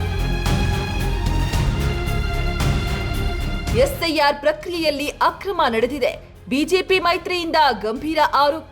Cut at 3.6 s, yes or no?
yes